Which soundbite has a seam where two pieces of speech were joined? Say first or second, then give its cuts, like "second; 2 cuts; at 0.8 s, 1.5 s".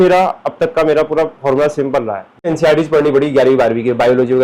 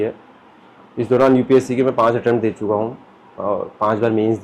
first; 1 cut; at 2.5 s